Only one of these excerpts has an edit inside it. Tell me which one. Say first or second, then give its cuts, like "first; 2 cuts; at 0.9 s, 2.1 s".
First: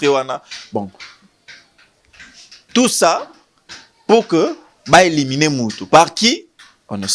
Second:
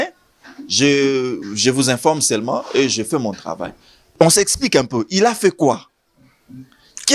second; 1 cut; at 4.1 s